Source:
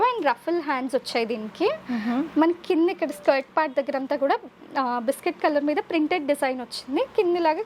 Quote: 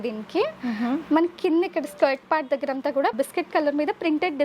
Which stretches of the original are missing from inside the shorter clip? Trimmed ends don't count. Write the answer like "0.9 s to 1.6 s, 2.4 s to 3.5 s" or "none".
4.4 s to 5.0 s